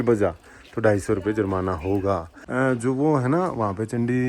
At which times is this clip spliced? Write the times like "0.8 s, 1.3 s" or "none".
2.4 s